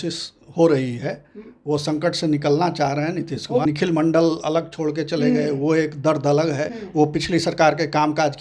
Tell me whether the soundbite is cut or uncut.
cut